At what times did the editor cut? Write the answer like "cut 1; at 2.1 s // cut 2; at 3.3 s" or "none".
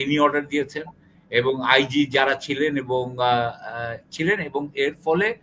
none

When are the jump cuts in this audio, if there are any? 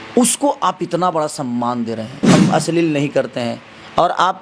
cut 1; at 2.1 s

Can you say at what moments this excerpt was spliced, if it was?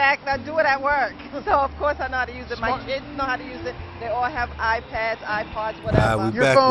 none

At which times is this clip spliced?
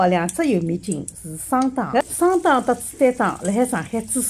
cut 1; at 2.0 s

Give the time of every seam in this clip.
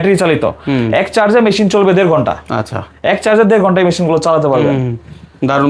none

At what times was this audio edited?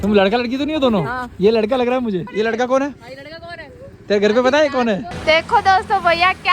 cut 1; at 2.3 s // cut 2; at 5.1 s

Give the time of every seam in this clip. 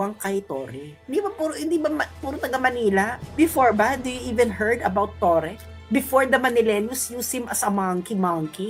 none

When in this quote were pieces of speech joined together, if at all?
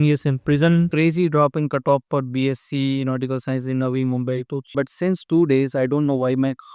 cut 1; at 0.9 s // cut 2; at 4.7 s

